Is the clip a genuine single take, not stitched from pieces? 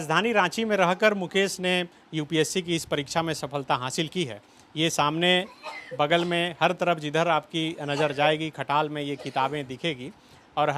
yes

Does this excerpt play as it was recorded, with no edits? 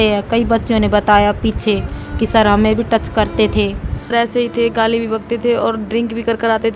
no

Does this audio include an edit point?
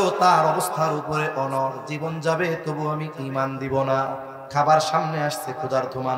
yes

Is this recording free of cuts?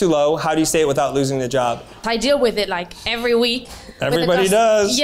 no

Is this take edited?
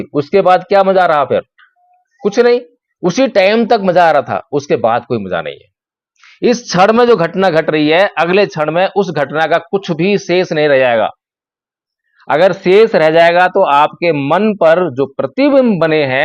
no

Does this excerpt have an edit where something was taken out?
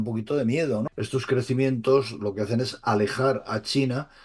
yes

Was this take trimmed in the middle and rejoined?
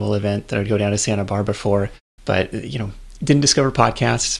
yes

